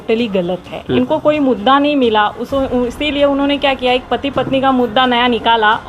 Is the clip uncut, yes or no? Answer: no